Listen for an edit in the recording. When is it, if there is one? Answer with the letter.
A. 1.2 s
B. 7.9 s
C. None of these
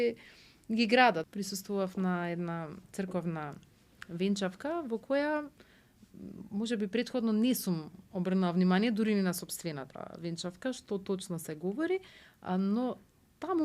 A